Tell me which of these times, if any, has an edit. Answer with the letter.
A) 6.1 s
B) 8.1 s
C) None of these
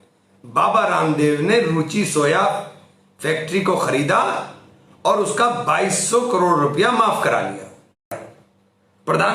B